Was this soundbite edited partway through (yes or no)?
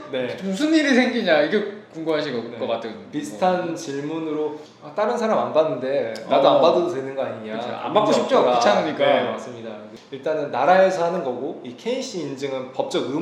no